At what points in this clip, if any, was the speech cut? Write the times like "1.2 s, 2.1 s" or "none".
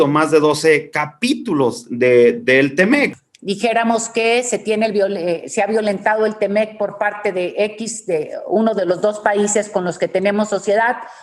3.1 s